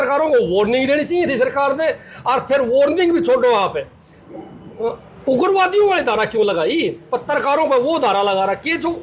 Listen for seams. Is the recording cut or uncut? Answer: uncut